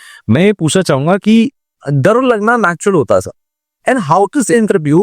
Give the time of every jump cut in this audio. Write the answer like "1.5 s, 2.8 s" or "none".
1.6 s